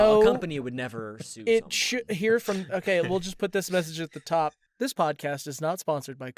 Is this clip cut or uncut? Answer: cut